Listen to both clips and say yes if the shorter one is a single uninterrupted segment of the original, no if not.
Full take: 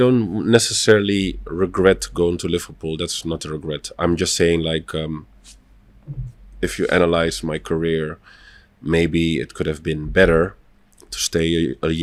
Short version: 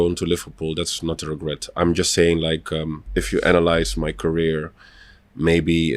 no